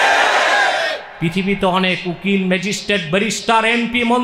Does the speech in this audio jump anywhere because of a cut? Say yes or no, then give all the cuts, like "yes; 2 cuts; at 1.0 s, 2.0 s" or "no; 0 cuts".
yes; 1 cut; at 1.1 s